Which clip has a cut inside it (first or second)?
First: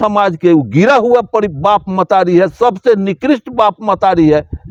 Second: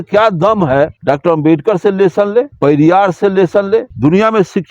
second